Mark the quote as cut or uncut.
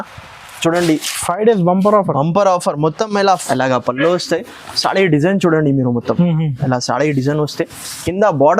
cut